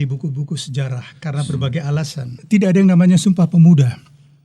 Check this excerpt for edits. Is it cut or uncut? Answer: cut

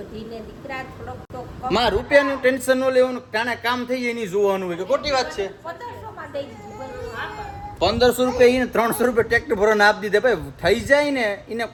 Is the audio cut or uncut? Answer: uncut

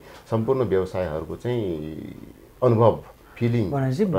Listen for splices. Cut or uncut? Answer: uncut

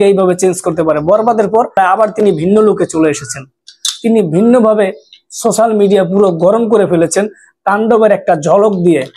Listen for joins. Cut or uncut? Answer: cut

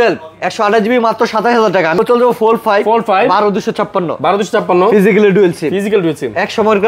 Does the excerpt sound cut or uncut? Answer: cut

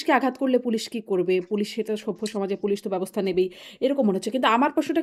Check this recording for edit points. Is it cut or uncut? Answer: uncut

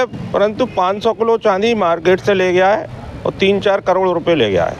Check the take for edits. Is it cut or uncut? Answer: uncut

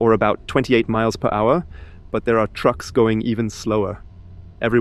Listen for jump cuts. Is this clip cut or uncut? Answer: uncut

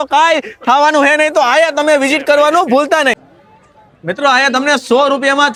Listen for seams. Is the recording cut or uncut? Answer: uncut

